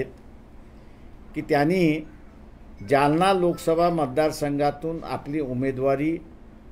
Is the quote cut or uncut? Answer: uncut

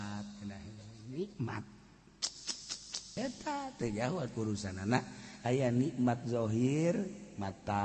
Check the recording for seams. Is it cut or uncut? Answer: cut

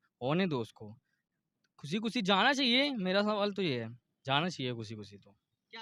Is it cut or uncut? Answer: uncut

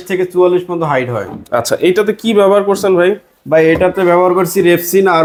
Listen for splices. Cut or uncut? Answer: uncut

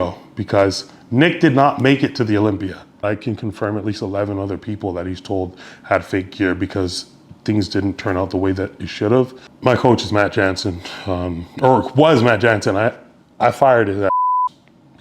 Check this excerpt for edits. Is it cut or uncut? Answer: cut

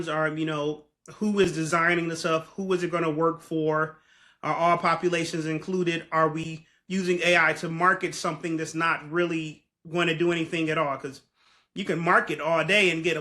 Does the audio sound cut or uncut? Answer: uncut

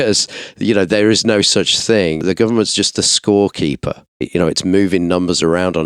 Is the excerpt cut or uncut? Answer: cut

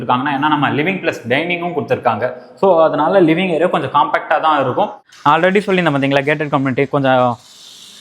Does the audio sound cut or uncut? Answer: cut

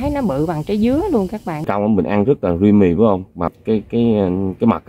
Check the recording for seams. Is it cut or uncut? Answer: cut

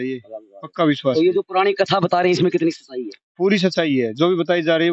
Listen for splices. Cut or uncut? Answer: uncut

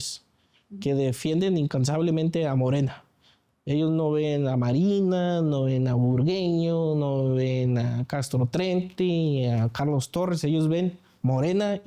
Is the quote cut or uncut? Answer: uncut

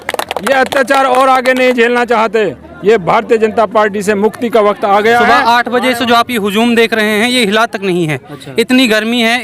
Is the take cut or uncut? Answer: cut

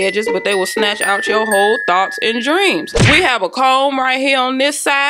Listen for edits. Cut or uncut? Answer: uncut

